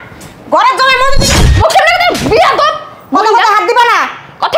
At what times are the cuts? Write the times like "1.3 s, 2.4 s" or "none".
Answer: 1.5 s